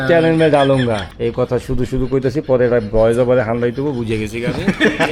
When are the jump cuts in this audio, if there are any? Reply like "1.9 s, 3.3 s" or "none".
1.1 s